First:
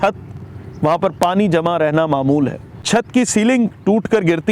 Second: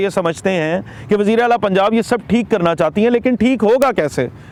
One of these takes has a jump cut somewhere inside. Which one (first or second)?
first